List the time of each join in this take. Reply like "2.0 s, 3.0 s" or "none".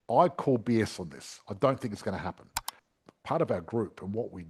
3.0 s